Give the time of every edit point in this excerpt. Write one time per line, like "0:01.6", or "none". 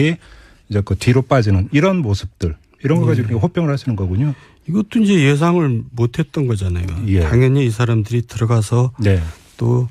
0:01.1